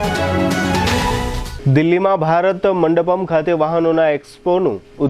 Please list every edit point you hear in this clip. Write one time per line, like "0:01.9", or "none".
0:01.0